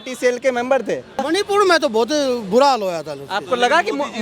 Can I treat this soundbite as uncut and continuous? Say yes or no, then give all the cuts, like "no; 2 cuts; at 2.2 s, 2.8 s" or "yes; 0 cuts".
no; 1 cut; at 1.2 s